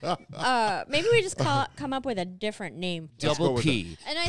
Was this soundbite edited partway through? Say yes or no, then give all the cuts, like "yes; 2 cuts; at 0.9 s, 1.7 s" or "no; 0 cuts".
yes; 1 cut; at 3.1 s